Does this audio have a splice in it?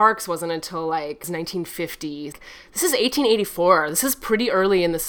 yes; 2 cuts; at 1.2 s, 2.3 s

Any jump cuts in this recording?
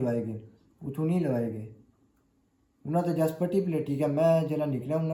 no; 0 cuts

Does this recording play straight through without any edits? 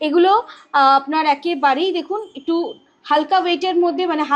yes; 0 cuts

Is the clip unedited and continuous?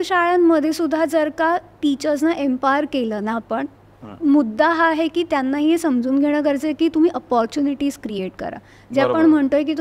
yes; 0 cuts

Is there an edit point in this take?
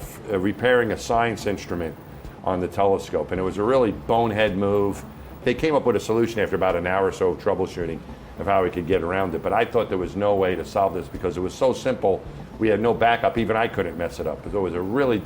yes; 1 cut; at 5.4 s

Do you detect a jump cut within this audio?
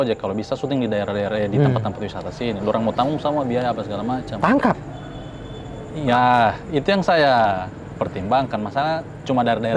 no; 0 cuts

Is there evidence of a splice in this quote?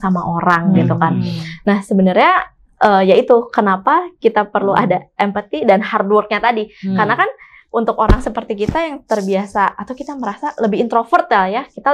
no; 0 cuts

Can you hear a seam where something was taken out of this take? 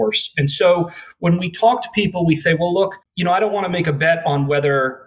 no; 0 cuts

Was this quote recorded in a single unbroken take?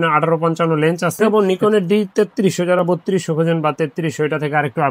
no; 1 cut; at 1.3 s

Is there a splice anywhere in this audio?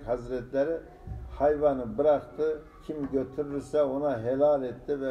no; 0 cuts

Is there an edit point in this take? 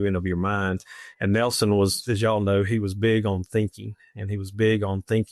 no; 0 cuts

